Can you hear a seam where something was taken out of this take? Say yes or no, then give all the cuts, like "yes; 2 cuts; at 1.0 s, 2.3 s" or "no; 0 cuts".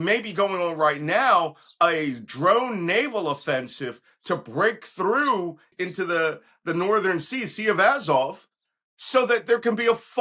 yes; 1 cut; at 5.7 s